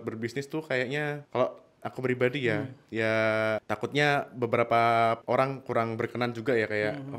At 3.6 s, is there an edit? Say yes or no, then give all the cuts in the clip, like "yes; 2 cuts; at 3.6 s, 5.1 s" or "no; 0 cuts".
yes; 3 cuts; at 1.2 s, 3.6 s, 5.2 s